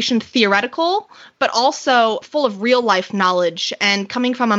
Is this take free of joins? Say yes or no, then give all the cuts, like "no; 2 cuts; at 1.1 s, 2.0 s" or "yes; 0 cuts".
yes; 0 cuts